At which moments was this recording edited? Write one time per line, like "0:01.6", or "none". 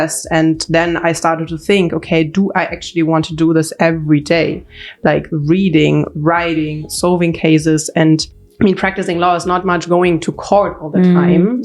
0:08.4